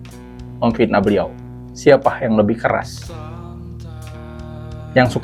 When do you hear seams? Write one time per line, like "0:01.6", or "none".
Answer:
none